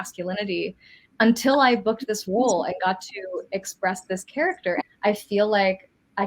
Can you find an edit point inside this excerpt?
yes; 1 cut; at 4.8 s

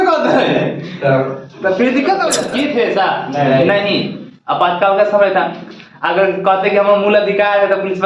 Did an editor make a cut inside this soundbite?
yes; 1 cut; at 2.5 s

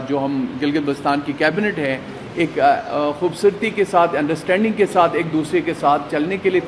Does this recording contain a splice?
no; 0 cuts

